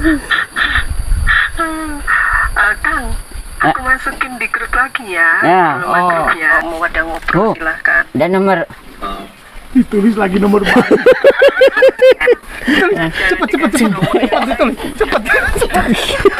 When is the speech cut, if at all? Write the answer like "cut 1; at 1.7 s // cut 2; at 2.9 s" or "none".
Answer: cut 1; at 6.5 s

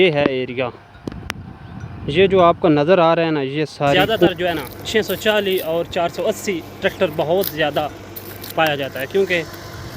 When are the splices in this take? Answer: cut 1; at 4.3 s

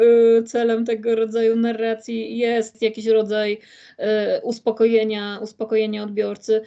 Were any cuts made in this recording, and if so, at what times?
cut 1; at 2.7 s

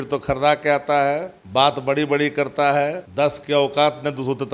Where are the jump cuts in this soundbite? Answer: cut 1; at 1.4 s // cut 2; at 3.0 s

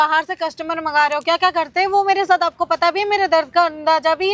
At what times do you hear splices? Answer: none

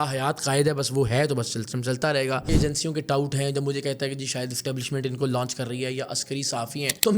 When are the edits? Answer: cut 1; at 2.5 s

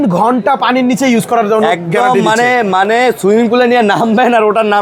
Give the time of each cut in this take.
none

